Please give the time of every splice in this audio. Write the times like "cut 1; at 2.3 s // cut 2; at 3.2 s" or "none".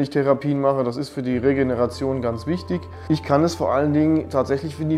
cut 1; at 2.9 s